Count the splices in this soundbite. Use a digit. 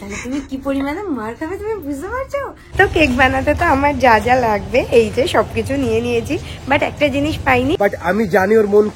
2